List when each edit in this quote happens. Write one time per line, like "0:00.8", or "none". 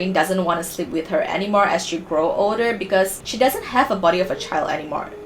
0:03.2

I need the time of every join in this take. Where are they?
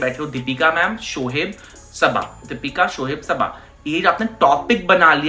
none

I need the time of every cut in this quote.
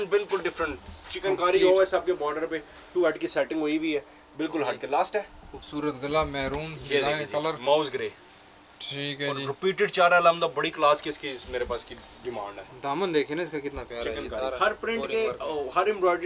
none

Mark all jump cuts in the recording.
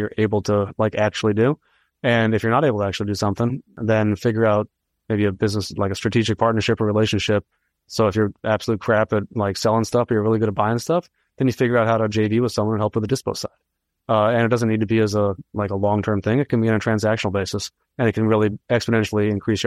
0:03.8
0:18.6

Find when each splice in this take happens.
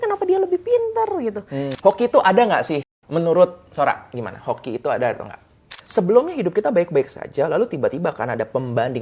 0:01.7
0:05.8

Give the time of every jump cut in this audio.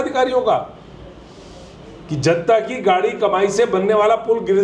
none

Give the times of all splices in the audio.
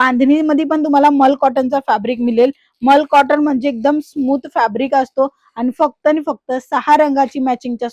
none

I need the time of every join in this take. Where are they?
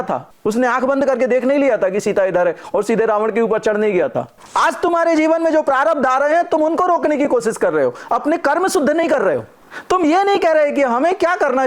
0:04.4

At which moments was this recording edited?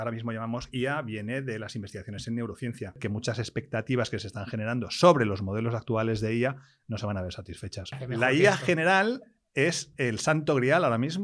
0:03.0
0:08.0

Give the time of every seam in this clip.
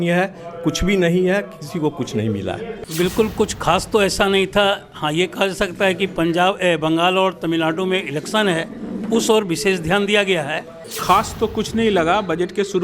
0:02.8
0:10.8

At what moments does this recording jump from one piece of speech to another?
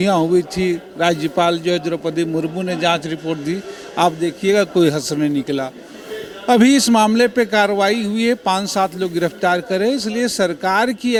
none

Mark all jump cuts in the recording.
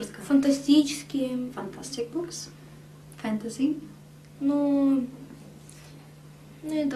none

